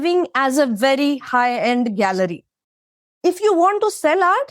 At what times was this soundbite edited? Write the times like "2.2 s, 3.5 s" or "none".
2.9 s